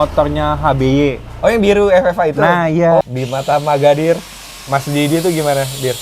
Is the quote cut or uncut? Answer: cut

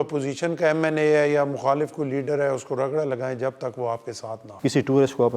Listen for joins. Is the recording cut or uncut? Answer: cut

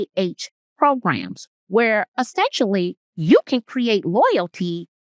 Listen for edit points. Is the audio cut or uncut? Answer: cut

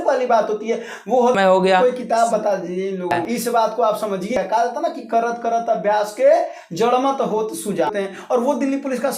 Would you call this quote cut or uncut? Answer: cut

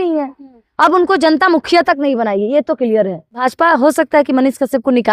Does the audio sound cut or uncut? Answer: cut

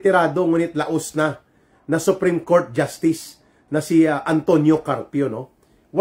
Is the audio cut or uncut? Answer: uncut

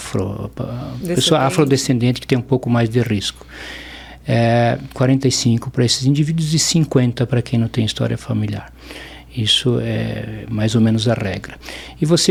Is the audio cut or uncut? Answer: uncut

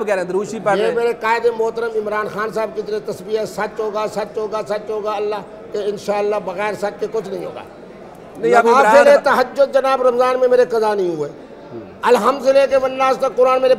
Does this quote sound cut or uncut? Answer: uncut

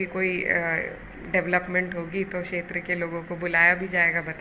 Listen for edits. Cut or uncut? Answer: uncut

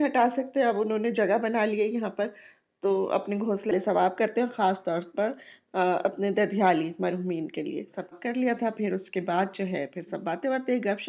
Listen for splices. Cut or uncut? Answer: cut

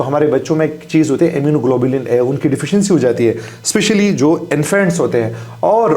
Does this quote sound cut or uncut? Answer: uncut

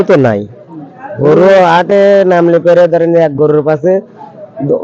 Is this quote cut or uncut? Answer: uncut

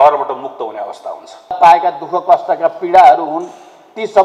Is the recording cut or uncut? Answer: cut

